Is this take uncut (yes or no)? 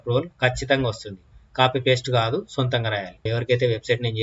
no